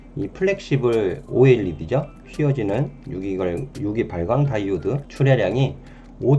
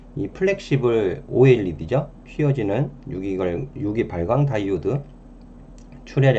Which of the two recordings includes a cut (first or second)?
first